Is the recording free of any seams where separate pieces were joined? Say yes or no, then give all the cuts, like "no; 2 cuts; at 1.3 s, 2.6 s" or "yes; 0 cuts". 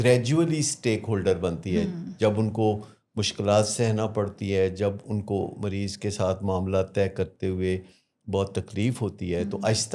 yes; 0 cuts